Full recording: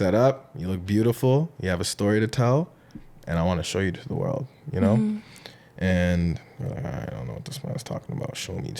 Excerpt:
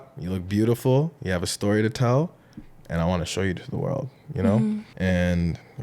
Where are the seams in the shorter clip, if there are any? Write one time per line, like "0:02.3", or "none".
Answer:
0:04.9